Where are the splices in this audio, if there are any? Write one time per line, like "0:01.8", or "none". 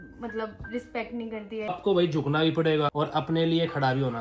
0:01.7
0:02.9